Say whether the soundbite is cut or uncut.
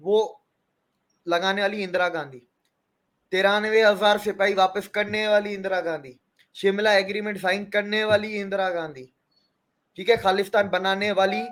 uncut